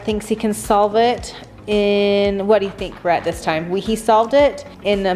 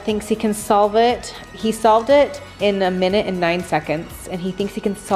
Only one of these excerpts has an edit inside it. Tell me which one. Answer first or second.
second